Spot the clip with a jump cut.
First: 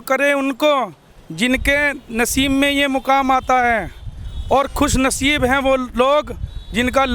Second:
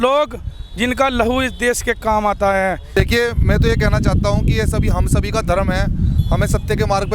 second; 1 cut; at 2.9 s

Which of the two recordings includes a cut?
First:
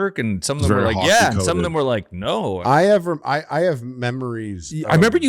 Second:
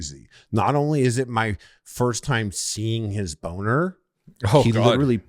first; 1 cut; at 2.6 s

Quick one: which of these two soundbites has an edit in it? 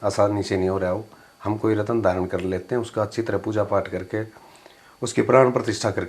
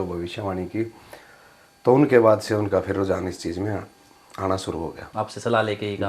second; 1 cut; at 5.0 s

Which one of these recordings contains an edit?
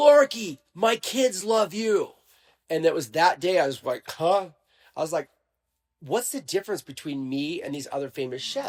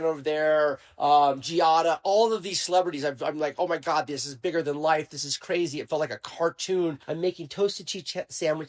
second; 1 cut; at 7.0 s

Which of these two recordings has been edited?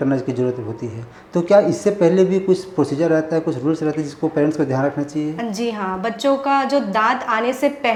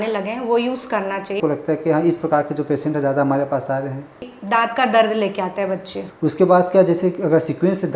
second; 3 cuts; at 1.4 s, 4.3 s, 6.0 s

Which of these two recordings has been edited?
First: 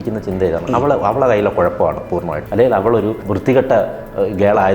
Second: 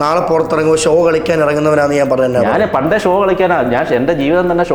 first; 2 cuts; at 2.4 s, 3.3 s

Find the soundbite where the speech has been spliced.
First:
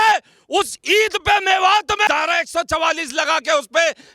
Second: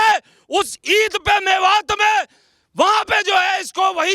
first; 1 cut; at 2.1 s

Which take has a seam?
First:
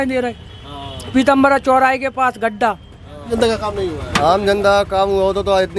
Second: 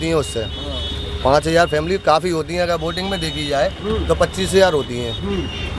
first; 1 cut; at 3.3 s

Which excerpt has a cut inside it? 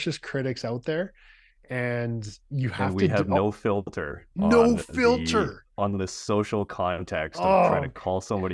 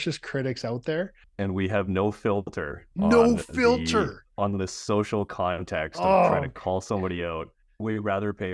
second; 2 cuts; at 1.3 s, 7.8 s

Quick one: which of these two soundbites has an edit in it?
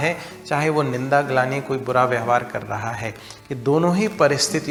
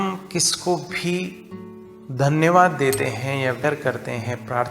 second; 1 cut; at 3.6 s

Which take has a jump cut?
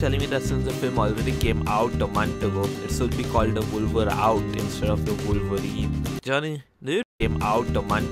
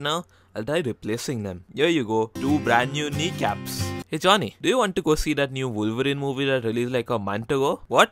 first; 1 cut; at 7.1 s

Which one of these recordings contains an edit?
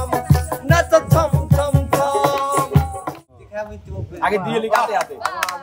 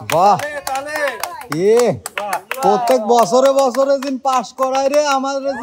first; 1 cut; at 3.1 s

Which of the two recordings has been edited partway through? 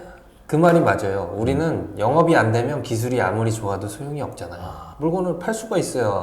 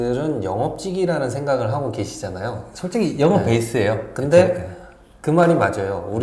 first; 1 cut; at 4.8 s

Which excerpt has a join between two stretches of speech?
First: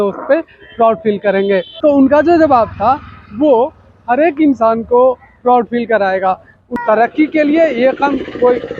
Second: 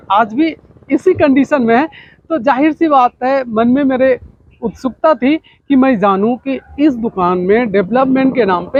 first; 2 cuts; at 1.7 s, 6.7 s

